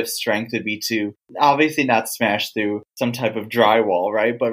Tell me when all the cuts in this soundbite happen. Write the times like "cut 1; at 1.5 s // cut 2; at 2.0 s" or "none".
none